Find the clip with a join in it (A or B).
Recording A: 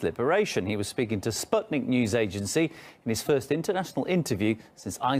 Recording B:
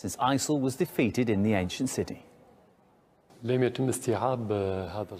A